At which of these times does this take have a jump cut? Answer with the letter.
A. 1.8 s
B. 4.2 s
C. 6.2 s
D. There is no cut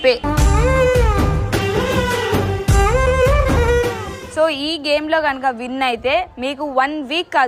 B